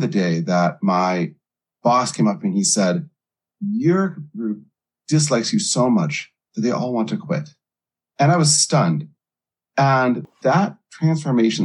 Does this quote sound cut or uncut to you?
cut